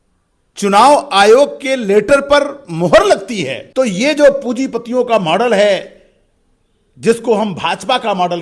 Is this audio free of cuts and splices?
no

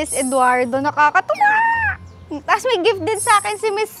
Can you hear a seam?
no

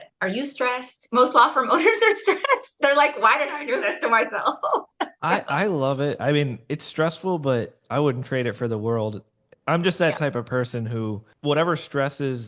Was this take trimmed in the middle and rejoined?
yes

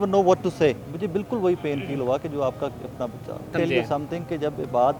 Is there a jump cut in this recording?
yes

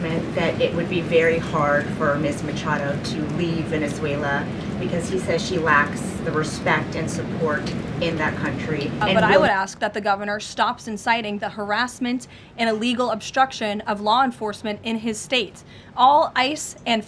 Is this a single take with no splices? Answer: no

